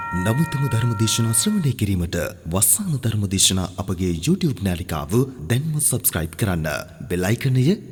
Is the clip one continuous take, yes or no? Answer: yes